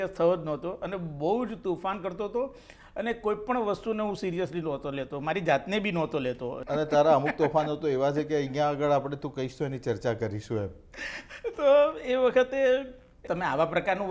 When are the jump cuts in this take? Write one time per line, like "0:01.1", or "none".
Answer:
0:06.6
0:13.2